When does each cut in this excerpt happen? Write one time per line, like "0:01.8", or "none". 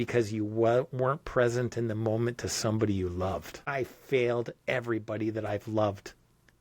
0:03.6